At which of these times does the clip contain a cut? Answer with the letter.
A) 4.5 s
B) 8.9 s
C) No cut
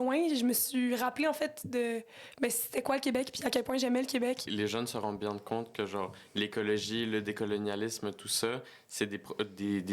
A